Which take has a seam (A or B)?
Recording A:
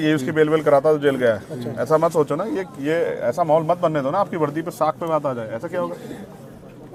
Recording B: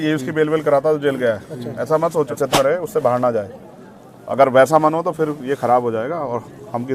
B